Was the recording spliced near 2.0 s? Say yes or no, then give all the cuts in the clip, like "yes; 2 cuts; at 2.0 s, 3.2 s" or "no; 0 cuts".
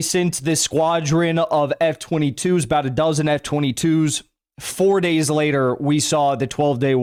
no; 0 cuts